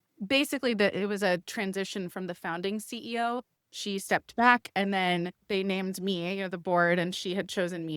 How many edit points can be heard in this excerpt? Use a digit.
1